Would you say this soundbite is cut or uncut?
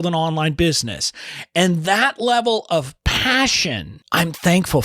cut